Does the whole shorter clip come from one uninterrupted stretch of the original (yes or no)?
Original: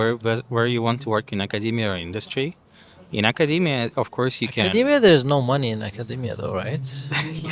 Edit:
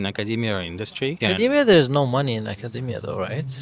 no